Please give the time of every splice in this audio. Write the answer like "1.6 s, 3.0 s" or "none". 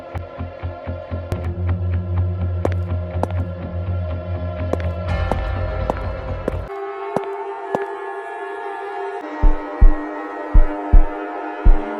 6.7 s, 9.2 s